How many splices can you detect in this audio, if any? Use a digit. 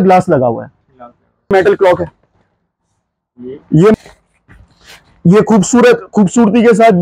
2